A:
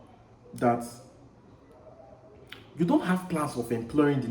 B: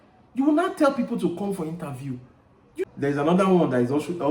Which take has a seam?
B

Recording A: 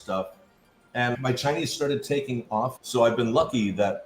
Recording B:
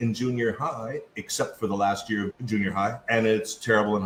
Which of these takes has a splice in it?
A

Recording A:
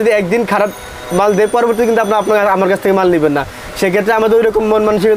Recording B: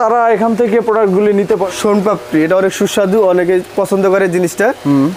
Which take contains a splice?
B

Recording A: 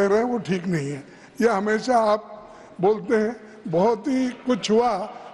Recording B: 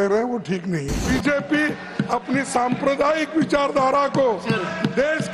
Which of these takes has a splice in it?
B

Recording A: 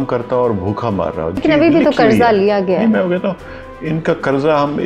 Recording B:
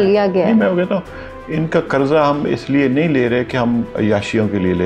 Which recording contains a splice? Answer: A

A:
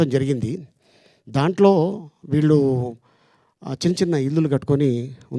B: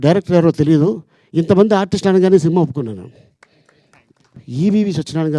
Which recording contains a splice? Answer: B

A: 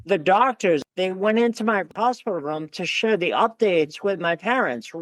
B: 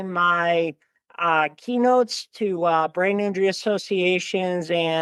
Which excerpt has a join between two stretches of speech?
A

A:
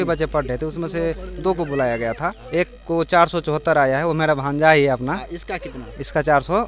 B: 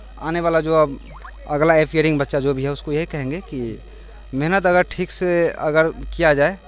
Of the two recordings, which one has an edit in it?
A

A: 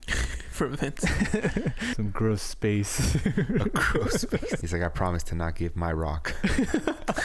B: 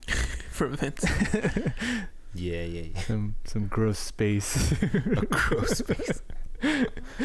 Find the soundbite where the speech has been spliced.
A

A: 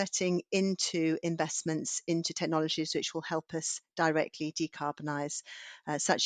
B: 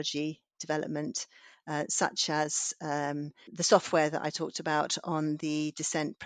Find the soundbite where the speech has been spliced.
B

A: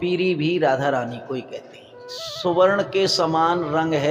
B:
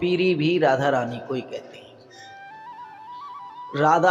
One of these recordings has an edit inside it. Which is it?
A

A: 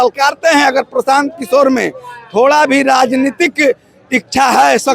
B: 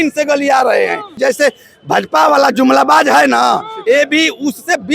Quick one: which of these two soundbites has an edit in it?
B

